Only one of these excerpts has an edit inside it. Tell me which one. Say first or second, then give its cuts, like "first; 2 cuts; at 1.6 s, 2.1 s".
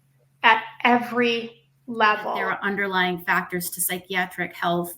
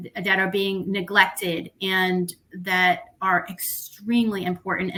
first; 1 cut; at 2.5 s